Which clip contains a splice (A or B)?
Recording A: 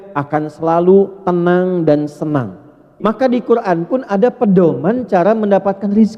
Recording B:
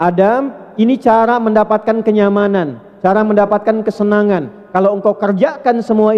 A